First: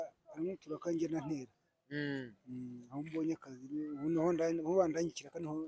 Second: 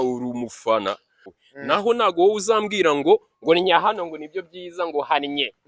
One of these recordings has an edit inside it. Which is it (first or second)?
second